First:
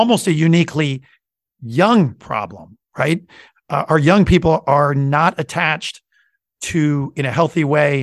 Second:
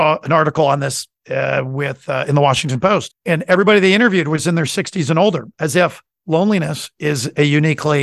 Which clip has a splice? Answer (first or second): second